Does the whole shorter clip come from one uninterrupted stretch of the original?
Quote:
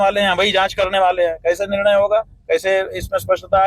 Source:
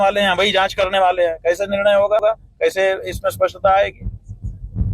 no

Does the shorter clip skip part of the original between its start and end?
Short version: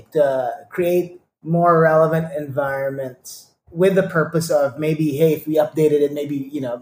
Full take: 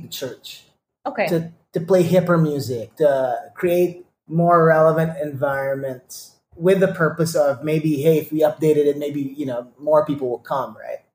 no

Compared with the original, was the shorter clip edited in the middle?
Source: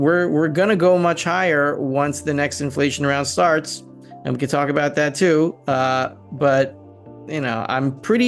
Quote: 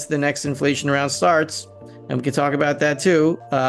no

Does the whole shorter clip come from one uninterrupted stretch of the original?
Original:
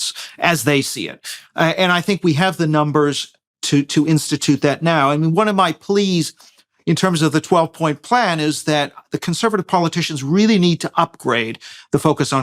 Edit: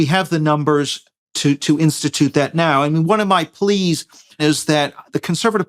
no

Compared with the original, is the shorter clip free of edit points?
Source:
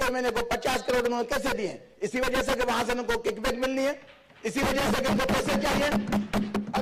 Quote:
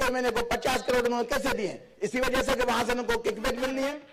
yes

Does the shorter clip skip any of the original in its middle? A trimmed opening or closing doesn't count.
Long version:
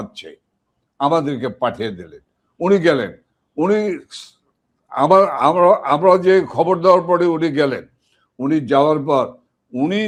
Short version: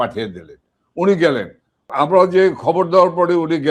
yes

